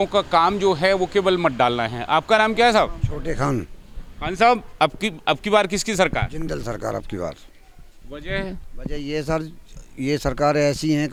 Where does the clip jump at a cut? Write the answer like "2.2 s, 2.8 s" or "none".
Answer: none